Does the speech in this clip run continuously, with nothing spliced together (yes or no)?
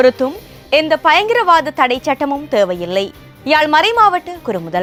yes